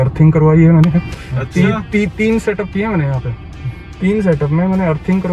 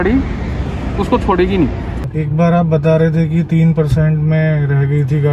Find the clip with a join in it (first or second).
second